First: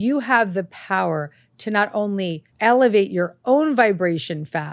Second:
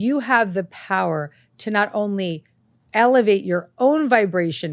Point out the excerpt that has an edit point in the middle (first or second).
first